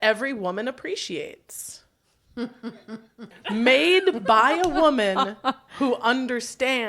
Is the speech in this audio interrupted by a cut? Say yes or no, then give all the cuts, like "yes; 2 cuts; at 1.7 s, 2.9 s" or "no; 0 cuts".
yes; 1 cut; at 3.4 s